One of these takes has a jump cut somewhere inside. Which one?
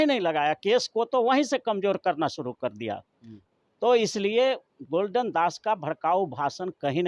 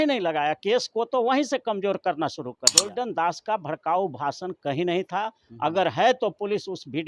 second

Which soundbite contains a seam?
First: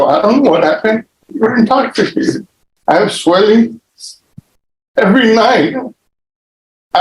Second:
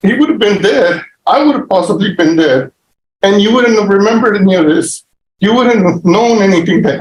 first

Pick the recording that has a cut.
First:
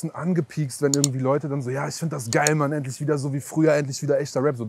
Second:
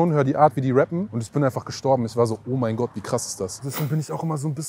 second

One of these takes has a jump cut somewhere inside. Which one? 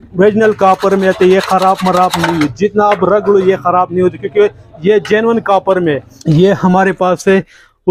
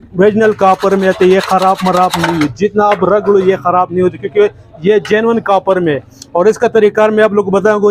first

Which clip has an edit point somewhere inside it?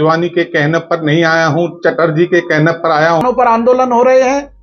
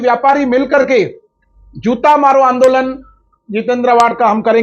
first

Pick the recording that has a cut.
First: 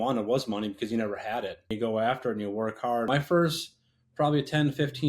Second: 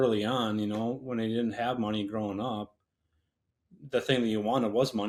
first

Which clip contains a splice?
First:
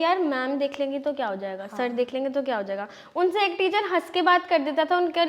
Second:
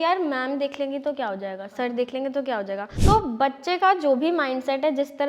second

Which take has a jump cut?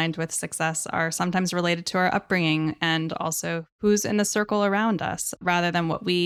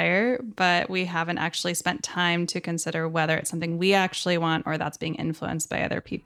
first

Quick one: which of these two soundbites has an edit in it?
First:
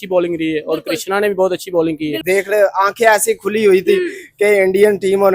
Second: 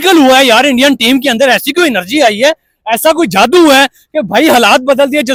first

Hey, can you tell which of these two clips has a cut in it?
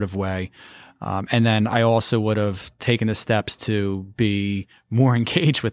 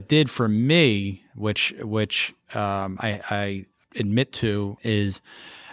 second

